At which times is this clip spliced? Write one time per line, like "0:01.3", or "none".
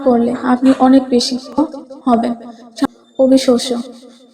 0:02.8